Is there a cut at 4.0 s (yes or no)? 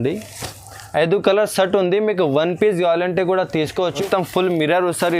yes